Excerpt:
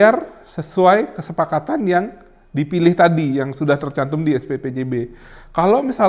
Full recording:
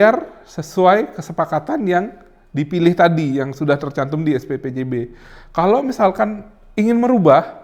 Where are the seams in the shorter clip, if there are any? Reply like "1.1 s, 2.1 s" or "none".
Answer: none